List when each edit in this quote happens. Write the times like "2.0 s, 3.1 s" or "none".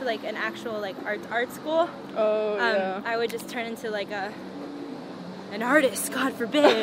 none